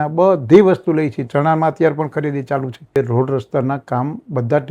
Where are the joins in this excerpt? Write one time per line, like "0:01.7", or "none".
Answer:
0:03.0